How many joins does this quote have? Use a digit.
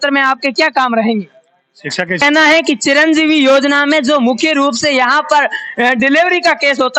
1